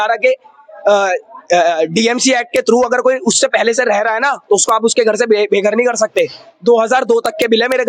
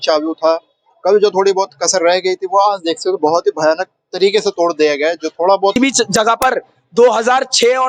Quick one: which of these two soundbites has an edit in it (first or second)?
second